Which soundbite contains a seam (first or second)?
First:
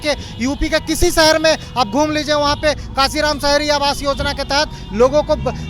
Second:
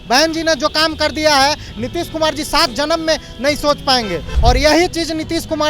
second